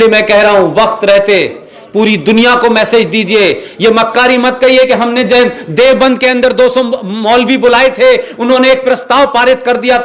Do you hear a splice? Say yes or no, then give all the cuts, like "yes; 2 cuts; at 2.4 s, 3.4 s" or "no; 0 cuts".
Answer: no; 0 cuts